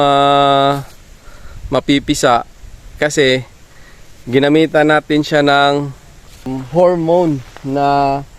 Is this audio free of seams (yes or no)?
no